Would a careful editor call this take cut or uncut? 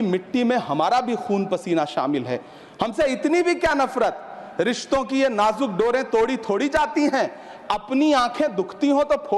uncut